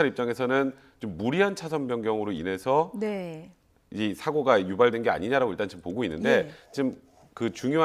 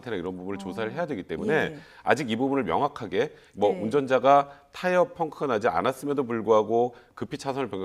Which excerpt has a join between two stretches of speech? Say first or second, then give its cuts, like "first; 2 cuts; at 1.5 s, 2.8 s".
second; 1 cut; at 3.0 s